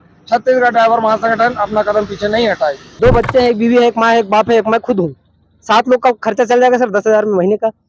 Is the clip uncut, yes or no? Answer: no